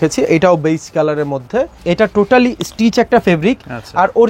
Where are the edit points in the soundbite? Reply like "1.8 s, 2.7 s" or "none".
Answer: 1.8 s